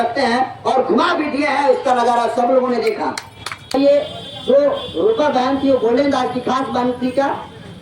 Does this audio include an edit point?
yes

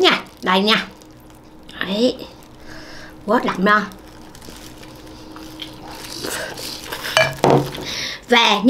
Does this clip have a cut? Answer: yes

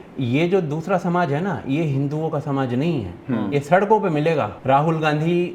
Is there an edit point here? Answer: yes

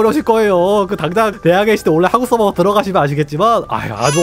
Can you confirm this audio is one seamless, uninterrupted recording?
no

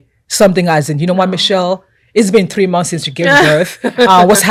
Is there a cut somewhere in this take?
no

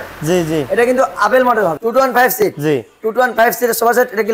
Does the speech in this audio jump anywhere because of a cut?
yes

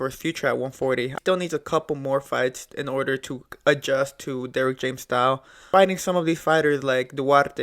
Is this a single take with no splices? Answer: no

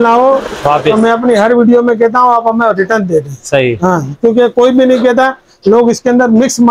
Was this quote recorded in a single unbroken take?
yes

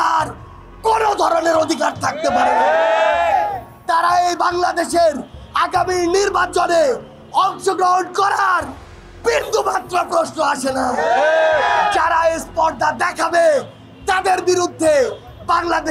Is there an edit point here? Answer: no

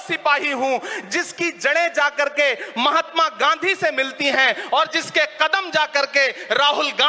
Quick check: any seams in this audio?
no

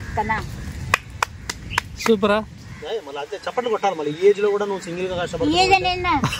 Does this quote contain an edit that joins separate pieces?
no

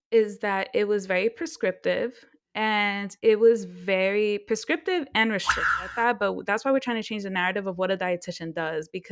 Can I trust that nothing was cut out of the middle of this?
no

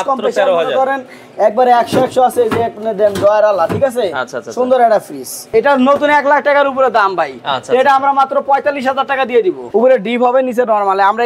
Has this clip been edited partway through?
yes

